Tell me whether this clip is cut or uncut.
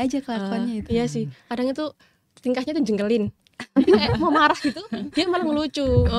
uncut